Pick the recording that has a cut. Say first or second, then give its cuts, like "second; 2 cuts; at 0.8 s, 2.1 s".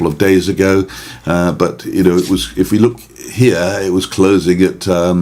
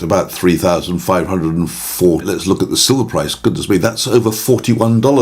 second; 1 cut; at 2.2 s